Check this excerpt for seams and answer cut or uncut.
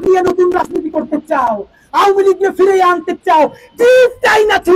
uncut